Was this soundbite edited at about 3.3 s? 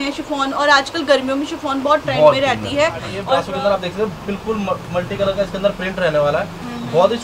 yes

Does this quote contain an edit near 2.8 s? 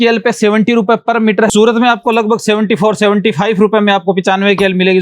no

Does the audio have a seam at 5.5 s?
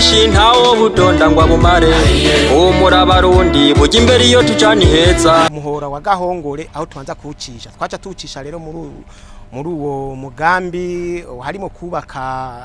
yes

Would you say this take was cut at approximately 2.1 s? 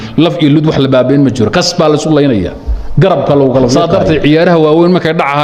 no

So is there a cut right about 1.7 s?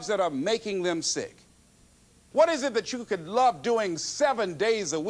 yes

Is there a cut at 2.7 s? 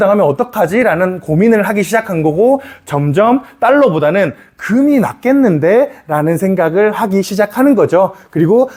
no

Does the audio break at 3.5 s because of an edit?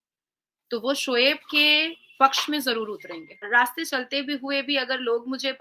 yes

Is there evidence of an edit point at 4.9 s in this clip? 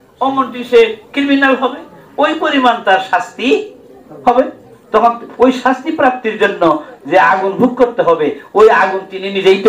no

